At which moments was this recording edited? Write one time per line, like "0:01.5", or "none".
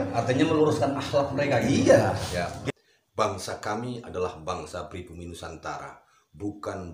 0:02.6